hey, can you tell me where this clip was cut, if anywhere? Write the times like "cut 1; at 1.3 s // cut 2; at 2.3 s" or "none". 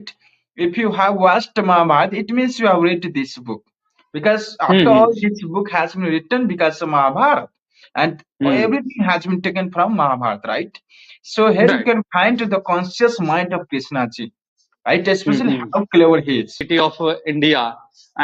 cut 1; at 16.6 s